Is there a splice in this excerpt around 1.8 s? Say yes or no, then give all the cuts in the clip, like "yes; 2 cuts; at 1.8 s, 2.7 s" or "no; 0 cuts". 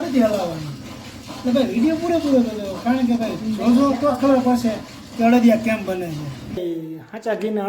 no; 1 cut; at 6.4 s